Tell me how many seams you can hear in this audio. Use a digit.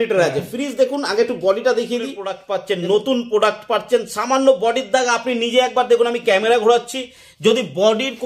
1